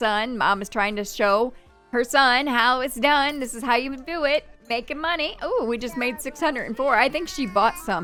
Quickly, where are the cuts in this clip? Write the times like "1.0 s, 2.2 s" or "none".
none